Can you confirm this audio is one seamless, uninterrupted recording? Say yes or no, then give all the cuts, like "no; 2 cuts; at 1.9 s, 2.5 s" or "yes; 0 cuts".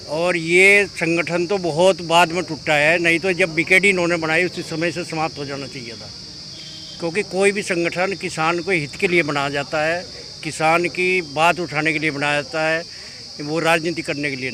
yes; 0 cuts